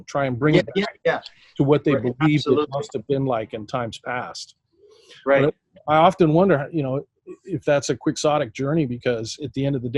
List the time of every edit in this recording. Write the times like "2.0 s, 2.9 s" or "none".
none